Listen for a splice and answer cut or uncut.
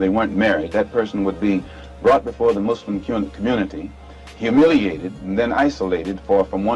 uncut